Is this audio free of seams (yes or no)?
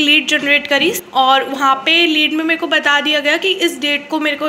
no